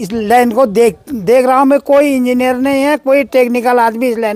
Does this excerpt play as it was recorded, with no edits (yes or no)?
yes